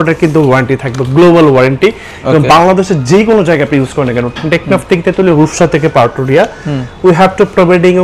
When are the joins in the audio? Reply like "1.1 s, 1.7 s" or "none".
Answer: none